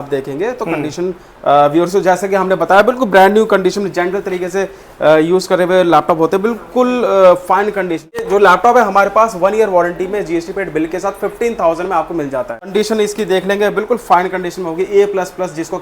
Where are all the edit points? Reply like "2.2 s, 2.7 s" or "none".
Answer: 8.3 s, 12.7 s